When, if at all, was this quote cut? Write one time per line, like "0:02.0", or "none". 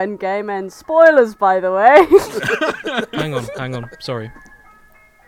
0:02.3